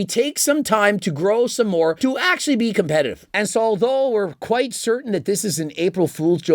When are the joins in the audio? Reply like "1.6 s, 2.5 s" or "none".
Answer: 3.2 s